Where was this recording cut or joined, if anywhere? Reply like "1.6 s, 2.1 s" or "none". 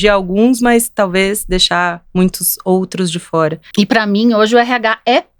3.6 s